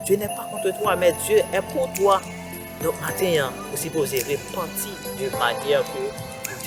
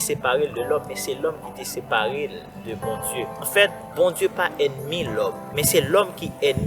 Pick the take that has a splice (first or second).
second